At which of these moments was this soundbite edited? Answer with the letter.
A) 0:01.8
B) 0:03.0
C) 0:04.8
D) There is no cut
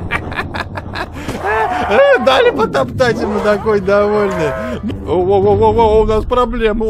C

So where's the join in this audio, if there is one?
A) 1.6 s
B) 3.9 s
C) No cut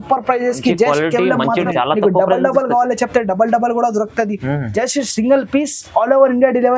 A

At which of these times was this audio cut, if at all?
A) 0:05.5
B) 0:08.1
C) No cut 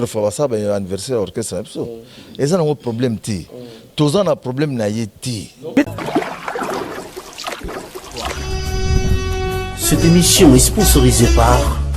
A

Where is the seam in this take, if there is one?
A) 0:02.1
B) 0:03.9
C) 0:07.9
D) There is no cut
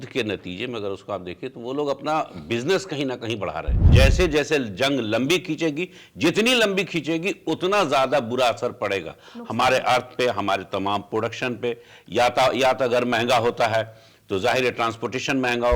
B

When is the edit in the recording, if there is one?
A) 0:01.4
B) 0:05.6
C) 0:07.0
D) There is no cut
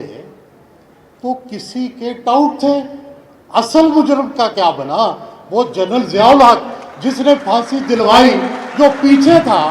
D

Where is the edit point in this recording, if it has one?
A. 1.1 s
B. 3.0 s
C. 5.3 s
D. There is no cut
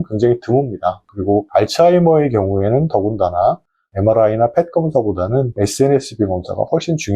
A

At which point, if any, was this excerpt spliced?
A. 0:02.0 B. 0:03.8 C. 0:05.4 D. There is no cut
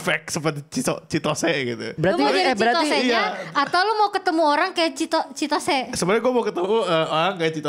A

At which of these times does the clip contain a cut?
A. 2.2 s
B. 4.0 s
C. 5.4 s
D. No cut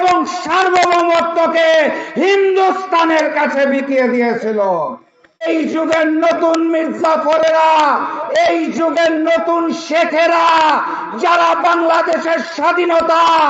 C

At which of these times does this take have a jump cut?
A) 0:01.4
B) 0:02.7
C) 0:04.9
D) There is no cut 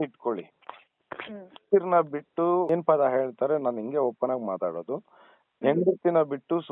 B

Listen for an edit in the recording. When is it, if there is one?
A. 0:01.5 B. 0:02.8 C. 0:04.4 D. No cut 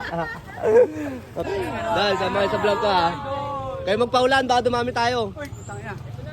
A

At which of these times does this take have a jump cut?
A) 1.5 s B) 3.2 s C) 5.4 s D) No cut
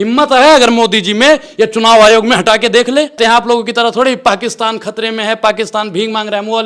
B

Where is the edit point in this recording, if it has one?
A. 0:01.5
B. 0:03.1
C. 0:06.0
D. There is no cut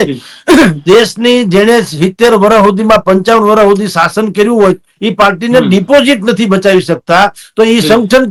D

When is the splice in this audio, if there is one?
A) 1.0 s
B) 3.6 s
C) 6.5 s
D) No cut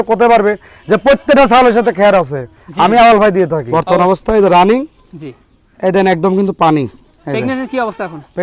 B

